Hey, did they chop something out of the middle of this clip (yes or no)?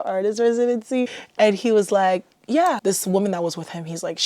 yes